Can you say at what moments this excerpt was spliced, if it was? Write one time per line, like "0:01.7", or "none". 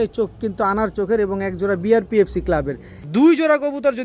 0:02.9